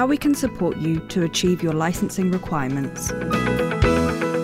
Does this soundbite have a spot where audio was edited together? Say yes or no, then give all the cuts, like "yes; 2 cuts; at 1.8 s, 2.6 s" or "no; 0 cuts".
yes; 1 cut; at 3.1 s